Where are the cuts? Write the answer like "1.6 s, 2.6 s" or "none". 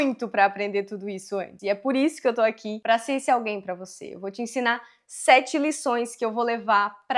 1.5 s, 2.7 s